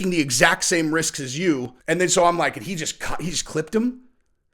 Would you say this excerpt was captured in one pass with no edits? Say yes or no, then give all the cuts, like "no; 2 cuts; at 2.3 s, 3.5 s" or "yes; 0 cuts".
no; 1 cut; at 1.7 s